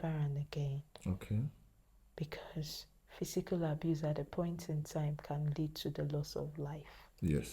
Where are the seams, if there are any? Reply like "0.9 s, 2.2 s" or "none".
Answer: none